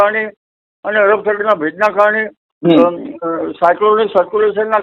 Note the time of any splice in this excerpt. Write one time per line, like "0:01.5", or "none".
none